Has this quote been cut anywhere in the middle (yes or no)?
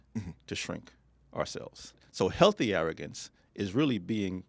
yes